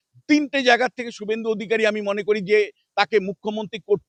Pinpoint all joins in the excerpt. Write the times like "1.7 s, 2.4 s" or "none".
none